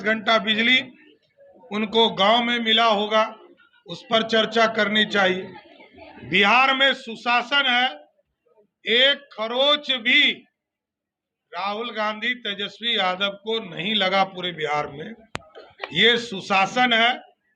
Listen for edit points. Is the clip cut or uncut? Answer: uncut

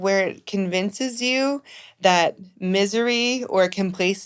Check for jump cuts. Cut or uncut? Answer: uncut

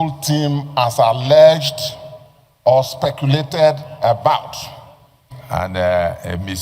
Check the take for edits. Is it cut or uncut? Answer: cut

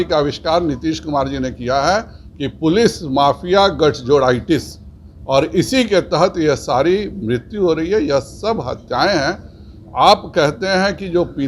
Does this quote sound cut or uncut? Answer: uncut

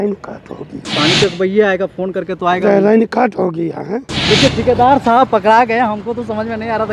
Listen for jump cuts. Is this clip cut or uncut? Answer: cut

